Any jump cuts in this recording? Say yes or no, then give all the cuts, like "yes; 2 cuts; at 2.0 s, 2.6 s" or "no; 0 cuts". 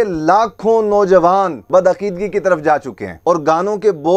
yes; 2 cuts; at 1.6 s, 3.2 s